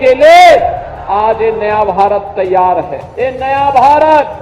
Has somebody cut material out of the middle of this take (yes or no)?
yes